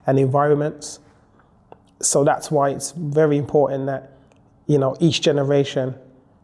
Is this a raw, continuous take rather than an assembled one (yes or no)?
yes